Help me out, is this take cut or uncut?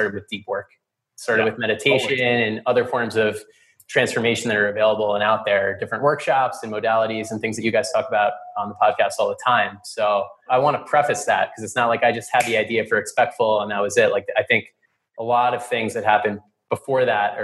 cut